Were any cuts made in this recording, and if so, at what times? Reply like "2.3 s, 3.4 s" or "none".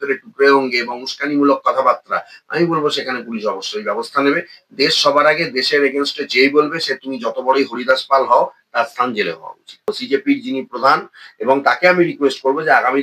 9.9 s